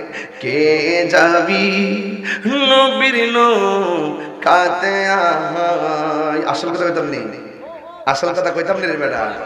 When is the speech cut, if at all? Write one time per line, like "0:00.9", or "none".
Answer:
none